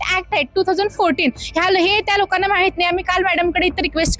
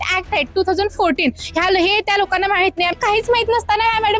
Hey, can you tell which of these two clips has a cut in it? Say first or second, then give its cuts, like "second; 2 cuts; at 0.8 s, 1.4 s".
second; 1 cut; at 3.0 s